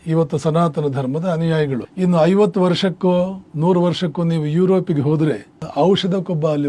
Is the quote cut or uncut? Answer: cut